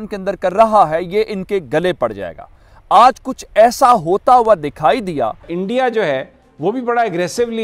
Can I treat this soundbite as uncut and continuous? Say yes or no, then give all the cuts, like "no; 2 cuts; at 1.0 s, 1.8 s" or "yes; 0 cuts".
no; 1 cut; at 5.5 s